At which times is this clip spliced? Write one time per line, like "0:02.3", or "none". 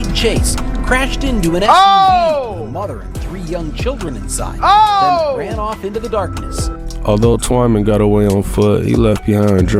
none